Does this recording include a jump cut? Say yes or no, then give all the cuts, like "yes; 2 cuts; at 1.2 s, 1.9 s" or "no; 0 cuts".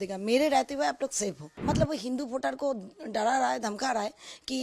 yes; 1 cut; at 1.5 s